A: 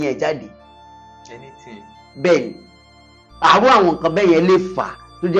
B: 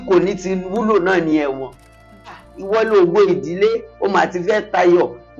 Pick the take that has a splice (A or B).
B